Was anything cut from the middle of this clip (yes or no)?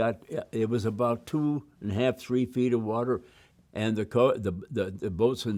no